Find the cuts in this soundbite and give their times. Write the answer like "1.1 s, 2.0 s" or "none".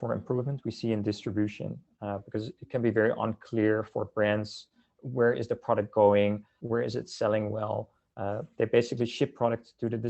6.5 s